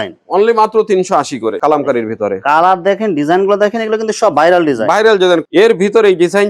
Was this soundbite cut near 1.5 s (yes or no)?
yes